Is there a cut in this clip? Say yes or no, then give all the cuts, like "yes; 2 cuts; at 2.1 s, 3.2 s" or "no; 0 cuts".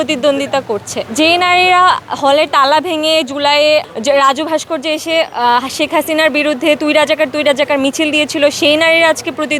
no; 0 cuts